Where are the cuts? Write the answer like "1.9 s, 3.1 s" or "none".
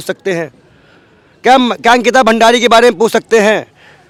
none